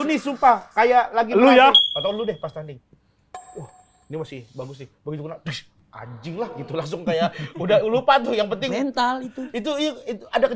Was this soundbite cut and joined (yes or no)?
yes